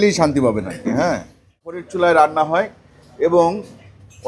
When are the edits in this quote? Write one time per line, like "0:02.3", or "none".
0:01.7